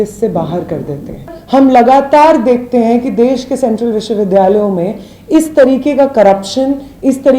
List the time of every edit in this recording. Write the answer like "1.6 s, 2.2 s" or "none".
1.4 s